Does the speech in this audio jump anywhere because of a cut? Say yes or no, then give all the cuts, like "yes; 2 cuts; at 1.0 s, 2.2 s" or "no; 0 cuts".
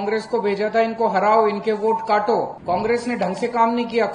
yes; 1 cut; at 2.6 s